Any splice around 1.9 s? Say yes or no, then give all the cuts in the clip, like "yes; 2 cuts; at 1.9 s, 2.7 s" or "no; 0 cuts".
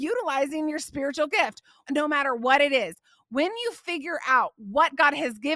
yes; 1 cut; at 1.9 s